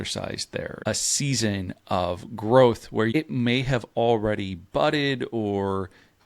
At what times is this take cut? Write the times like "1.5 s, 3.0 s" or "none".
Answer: 0.8 s, 3.1 s